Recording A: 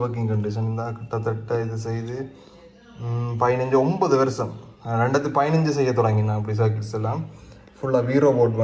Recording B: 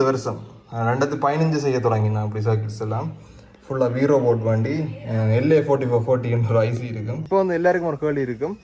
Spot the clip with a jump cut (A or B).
B